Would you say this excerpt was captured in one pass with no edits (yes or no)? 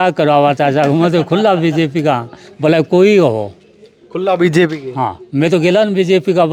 yes